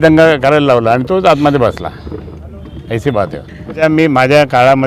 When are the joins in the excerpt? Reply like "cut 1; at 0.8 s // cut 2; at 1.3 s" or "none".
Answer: cut 1; at 3.8 s